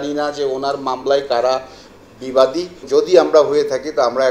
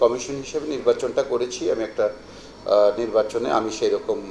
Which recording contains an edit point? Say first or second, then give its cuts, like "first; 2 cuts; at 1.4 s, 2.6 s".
first; 1 cut; at 2.8 s